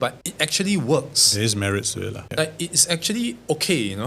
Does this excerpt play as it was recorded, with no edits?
yes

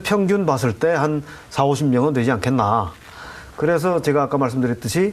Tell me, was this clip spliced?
yes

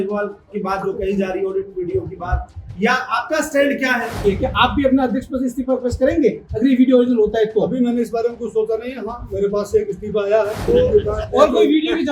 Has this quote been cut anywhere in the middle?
yes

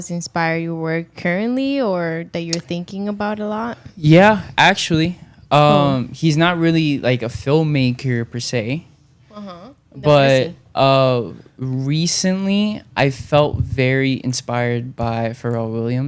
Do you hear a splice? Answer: no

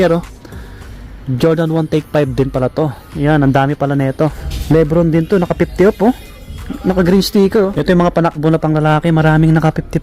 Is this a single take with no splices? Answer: no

